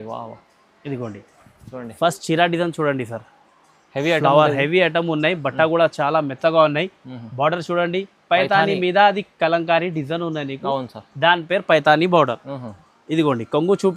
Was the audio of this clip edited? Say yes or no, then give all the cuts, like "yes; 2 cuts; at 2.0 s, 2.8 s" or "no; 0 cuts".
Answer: no; 0 cuts